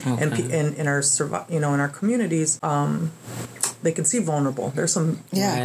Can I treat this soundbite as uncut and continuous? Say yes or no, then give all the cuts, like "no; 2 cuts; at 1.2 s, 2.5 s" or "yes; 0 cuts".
no; 1 cut; at 2.6 s